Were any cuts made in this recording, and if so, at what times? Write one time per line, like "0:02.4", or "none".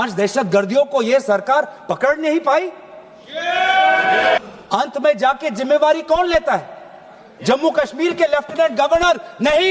0:04.4